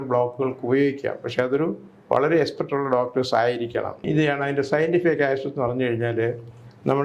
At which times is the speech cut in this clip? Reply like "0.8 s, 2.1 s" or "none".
4.1 s